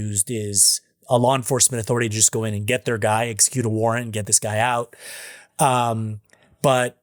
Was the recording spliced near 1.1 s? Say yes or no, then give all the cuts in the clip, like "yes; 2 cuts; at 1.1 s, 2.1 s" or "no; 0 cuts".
no; 0 cuts